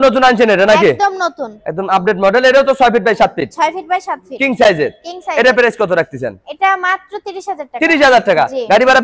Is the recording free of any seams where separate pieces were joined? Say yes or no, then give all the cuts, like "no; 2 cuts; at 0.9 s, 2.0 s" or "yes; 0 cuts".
yes; 0 cuts